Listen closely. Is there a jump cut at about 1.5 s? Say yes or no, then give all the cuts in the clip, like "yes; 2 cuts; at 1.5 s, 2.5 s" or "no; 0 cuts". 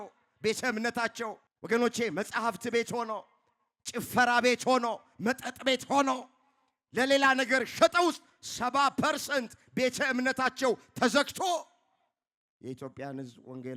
yes; 1 cut; at 1.5 s